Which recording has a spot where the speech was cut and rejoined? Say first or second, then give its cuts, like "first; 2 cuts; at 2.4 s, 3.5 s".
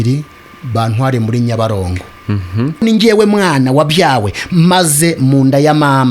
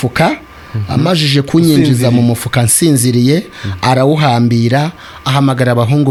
first; 1 cut; at 2.8 s